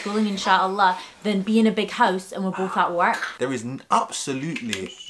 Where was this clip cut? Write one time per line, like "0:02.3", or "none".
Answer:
0:03.4